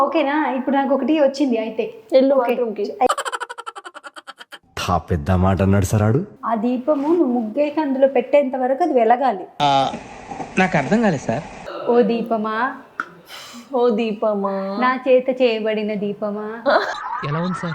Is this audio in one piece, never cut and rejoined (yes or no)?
no